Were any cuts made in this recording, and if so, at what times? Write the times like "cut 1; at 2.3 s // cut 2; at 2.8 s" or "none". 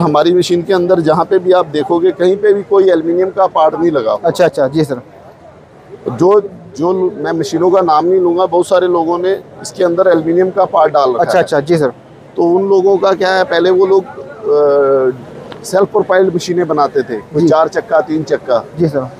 none